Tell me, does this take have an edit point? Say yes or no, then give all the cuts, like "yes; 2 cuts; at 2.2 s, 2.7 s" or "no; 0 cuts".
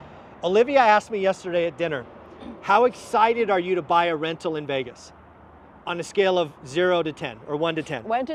no; 0 cuts